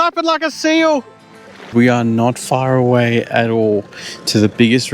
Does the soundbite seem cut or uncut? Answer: cut